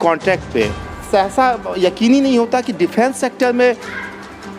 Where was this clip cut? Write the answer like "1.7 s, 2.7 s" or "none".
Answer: 0.9 s